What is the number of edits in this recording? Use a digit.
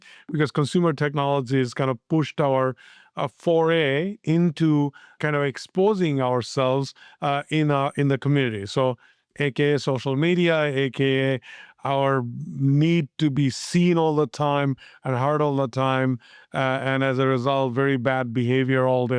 1